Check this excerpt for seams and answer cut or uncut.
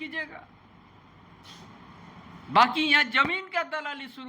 cut